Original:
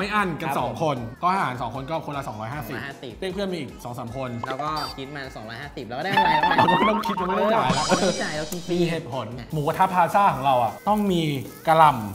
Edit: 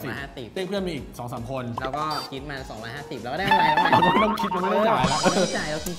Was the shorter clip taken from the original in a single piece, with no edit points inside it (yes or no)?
yes